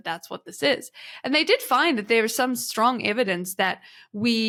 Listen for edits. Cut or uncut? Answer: uncut